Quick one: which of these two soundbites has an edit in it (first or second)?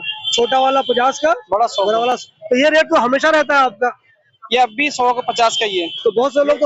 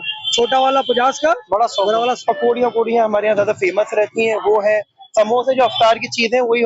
second